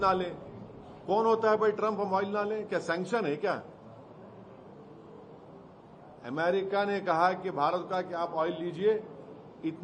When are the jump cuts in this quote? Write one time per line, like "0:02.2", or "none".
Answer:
none

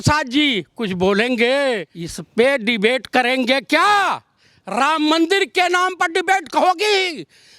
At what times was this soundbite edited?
none

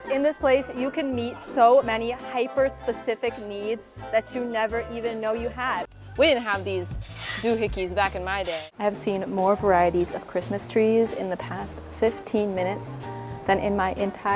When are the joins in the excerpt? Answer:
0:05.9
0:08.5

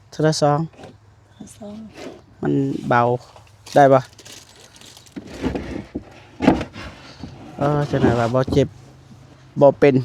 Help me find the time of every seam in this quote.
none

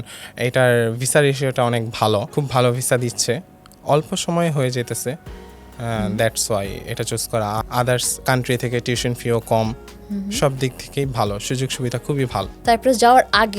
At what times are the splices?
none

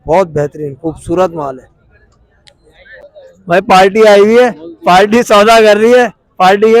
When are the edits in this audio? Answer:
0:03.0

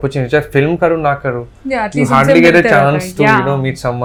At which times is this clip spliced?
none

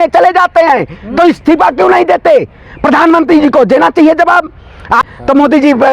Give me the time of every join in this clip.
0:05.0

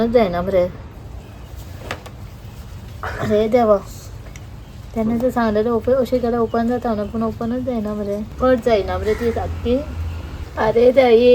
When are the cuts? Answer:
none

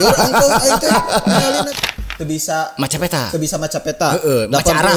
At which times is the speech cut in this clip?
0:01.7

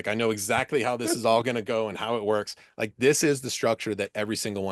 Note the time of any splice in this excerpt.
none

